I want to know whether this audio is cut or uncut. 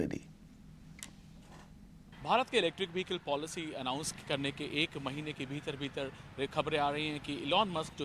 uncut